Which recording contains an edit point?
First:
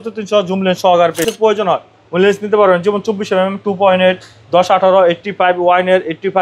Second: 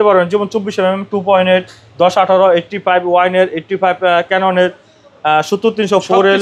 first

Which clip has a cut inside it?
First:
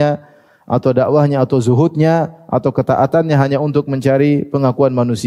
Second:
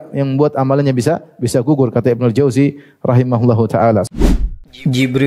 second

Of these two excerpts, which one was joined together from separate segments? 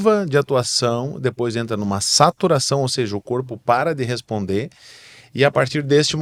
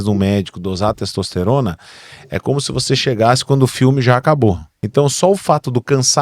second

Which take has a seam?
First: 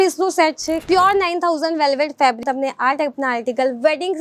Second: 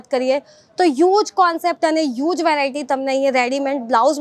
first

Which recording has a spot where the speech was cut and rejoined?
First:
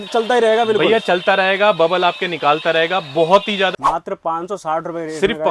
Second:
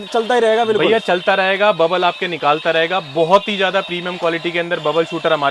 first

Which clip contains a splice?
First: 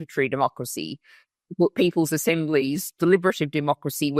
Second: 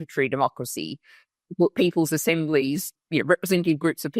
second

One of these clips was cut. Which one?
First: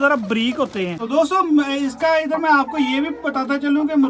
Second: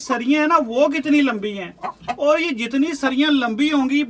first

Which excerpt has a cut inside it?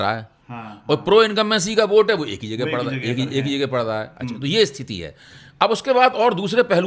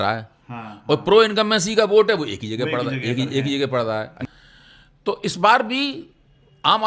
second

